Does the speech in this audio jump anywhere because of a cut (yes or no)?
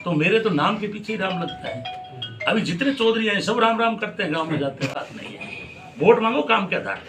yes